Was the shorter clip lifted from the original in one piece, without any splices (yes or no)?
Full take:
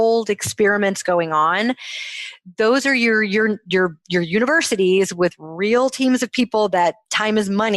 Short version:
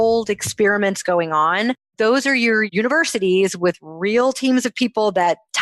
no